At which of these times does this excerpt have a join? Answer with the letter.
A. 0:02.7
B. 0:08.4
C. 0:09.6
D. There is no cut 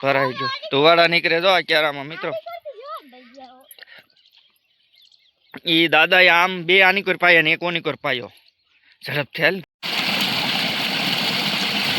C